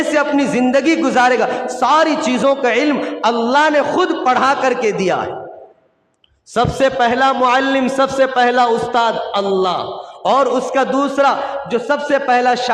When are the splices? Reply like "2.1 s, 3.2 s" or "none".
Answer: none